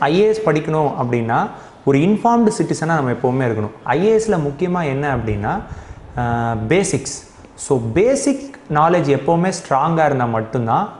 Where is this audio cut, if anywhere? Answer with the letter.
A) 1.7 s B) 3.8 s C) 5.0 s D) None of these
B